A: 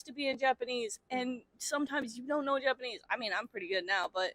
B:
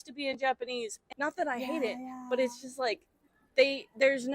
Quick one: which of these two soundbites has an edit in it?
B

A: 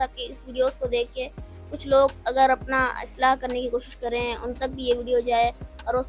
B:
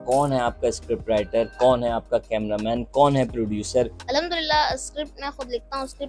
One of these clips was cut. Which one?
B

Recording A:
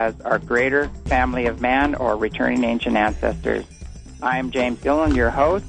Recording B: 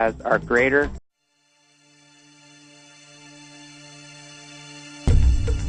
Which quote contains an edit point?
A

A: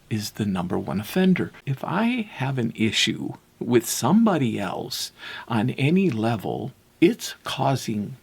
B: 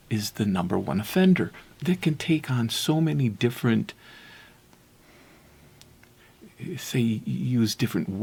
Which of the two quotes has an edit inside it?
A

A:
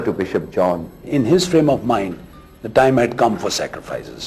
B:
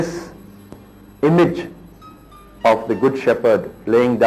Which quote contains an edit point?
A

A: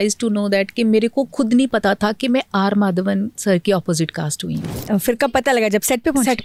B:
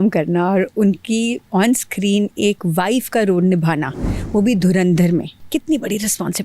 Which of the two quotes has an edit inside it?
B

